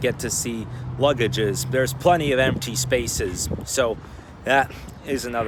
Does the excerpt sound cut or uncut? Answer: uncut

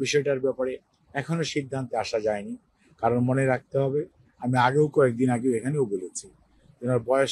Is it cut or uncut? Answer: uncut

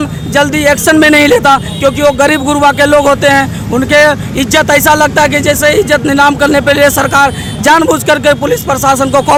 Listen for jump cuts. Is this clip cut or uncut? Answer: uncut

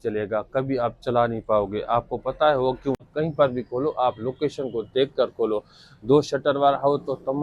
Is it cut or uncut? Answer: cut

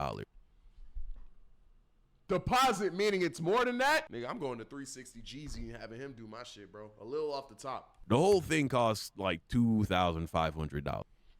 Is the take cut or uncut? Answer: cut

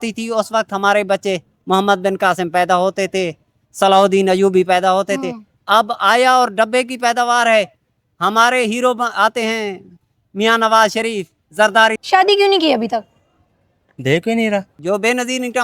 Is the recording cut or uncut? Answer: cut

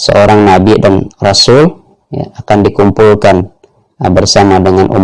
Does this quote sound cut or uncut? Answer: uncut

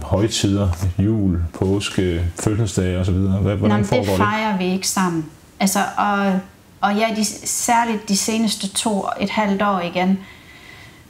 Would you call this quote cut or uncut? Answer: uncut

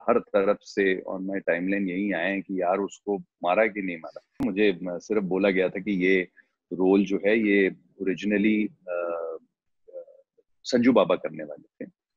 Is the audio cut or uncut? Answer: cut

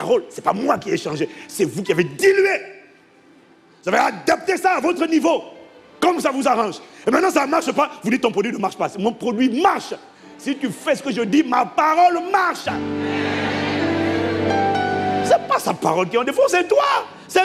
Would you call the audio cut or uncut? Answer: uncut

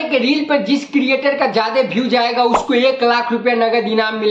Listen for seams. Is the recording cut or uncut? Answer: uncut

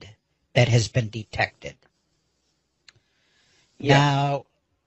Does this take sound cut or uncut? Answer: uncut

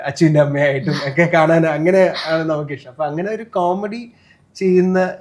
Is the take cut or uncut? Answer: uncut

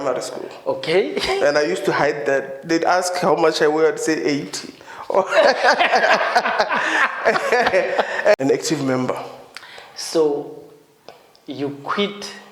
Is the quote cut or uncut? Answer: cut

